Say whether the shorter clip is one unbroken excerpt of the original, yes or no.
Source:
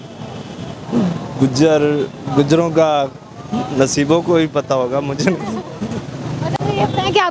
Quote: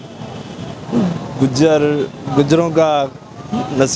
yes